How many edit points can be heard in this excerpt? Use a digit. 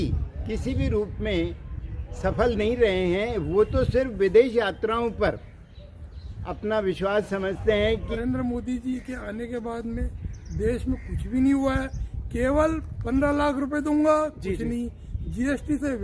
1